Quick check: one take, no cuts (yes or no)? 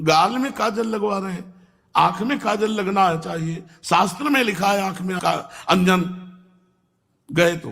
no